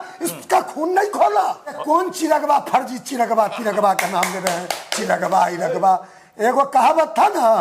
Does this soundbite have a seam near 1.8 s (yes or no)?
yes